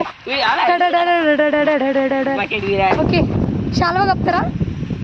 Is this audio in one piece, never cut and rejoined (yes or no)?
yes